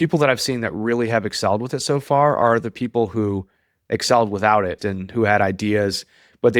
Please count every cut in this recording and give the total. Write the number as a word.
one